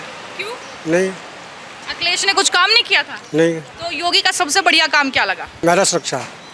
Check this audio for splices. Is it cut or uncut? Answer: cut